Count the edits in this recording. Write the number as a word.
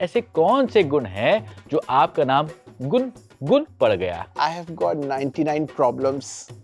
one